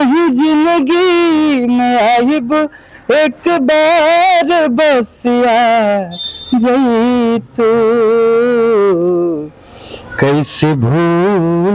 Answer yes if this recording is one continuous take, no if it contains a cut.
yes